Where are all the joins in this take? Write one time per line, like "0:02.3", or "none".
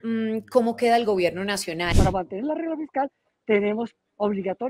0:01.9